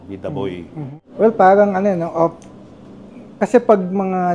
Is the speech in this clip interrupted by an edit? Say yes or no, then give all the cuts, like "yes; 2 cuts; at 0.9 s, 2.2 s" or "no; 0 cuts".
yes; 1 cut; at 0.9 s